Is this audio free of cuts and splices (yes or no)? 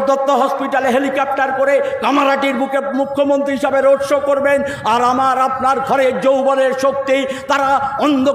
yes